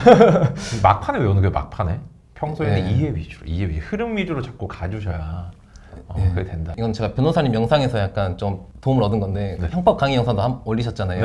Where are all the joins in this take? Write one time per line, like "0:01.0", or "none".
0:06.7
0:08.7